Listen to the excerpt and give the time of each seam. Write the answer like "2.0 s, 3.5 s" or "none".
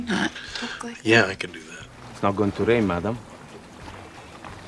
1.9 s